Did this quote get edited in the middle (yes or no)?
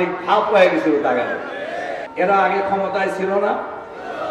yes